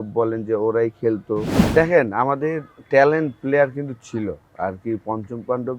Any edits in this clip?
yes; 1 cut; at 1.6 s

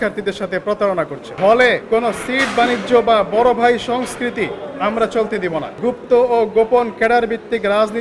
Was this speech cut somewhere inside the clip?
yes; 3 cuts; at 1.2 s, 1.8 s, 5.7 s

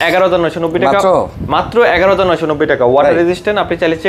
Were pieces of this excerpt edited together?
no; 0 cuts

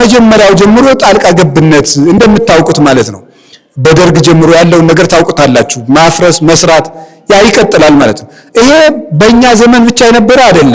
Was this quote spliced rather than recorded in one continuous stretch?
no; 0 cuts

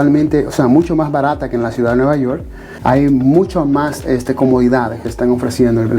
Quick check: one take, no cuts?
no; 1 cut; at 2.7 s

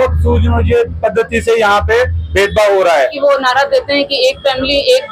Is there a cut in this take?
yes; 1 cut; at 3.1 s

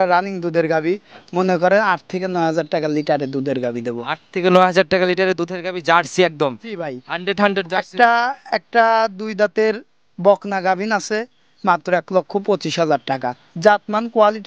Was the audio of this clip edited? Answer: no; 0 cuts

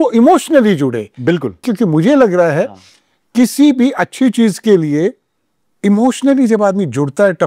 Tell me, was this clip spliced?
yes; 1 cut; at 1.7 s

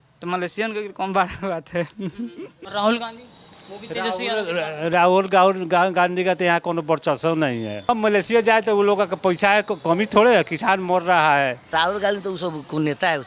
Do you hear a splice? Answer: yes; 2 cuts; at 7.9 s, 11.6 s

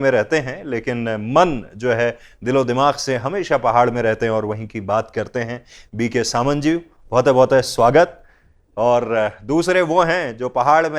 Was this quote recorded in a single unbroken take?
yes; 0 cuts

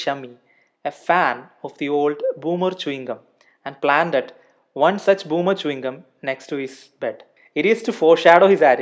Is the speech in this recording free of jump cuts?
yes; 0 cuts

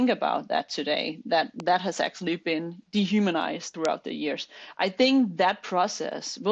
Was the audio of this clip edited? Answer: yes; 2 cuts; at 2.8 s, 3.7 s

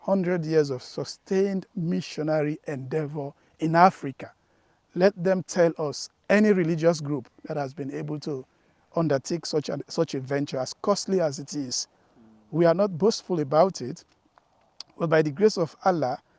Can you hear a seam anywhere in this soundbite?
no; 0 cuts

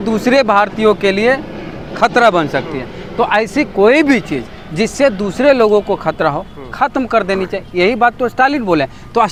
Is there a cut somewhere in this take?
no; 0 cuts

